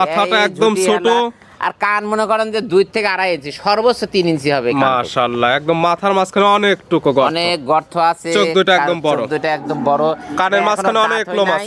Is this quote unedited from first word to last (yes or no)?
yes